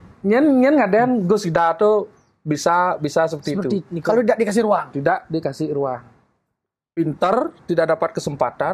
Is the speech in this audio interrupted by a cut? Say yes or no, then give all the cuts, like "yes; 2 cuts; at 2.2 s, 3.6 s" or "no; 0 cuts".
no; 0 cuts